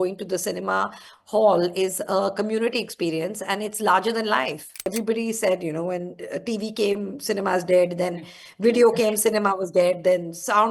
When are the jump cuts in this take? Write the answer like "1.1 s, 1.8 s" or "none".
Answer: 4.9 s